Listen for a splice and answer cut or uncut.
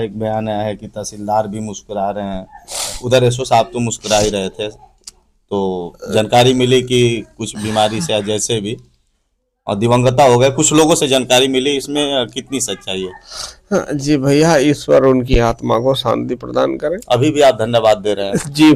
uncut